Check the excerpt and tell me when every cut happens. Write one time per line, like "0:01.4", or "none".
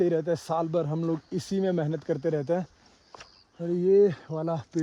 none